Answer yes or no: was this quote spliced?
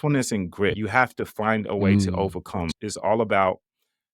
yes